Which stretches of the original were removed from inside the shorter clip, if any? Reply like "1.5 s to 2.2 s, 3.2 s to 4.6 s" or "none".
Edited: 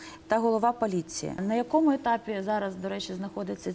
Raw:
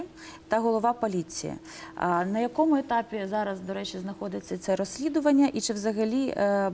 1.6 s to 2.3 s